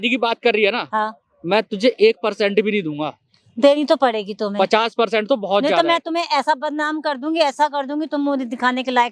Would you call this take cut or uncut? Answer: uncut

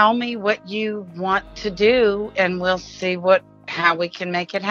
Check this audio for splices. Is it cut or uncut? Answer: cut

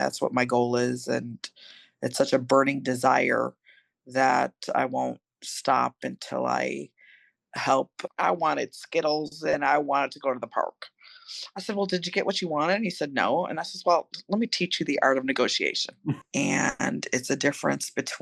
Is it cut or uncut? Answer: cut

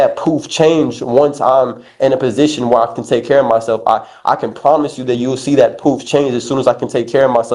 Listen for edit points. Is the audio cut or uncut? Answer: uncut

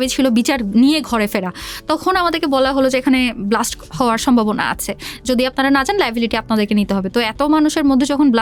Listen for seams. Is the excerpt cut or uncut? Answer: uncut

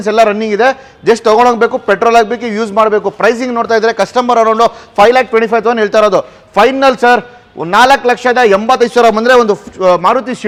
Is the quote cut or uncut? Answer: uncut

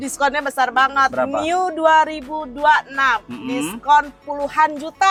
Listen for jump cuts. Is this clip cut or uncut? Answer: uncut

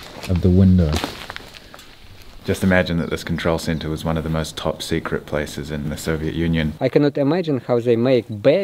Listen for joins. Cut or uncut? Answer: cut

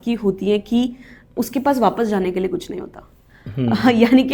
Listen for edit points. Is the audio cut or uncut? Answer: uncut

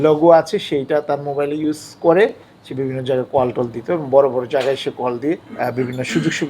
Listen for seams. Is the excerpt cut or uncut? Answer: cut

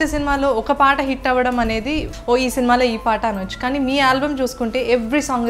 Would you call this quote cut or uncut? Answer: cut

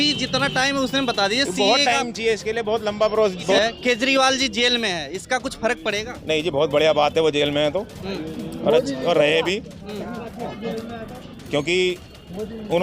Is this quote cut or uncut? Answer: cut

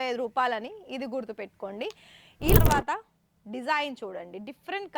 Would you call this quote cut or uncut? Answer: cut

